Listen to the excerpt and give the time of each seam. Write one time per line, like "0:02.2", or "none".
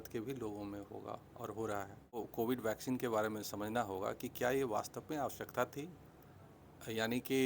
0:02.3